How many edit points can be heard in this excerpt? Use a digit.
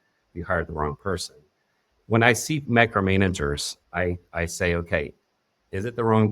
1